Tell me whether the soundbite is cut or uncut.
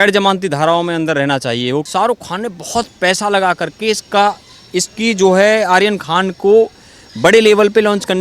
cut